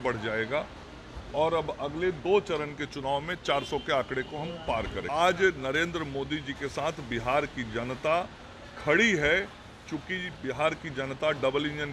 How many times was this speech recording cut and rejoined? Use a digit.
2